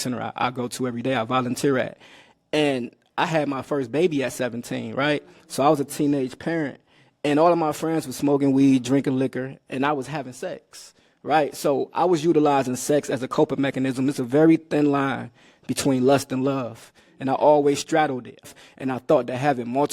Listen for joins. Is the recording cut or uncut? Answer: cut